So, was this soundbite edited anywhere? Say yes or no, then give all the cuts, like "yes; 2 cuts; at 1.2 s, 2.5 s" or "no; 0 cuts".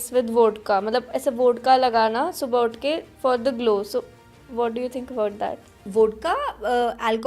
yes; 1 cut; at 5.8 s